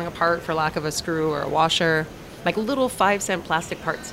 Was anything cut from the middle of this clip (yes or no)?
no